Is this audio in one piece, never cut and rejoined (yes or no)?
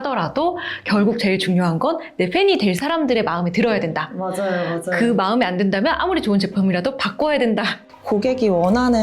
no